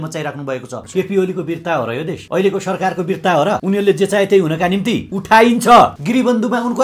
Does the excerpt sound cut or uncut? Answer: cut